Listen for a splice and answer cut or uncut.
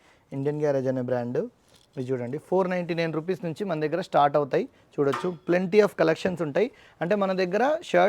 uncut